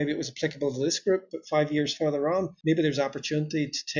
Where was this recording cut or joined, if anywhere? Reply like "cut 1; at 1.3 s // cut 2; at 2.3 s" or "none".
cut 1; at 2.5 s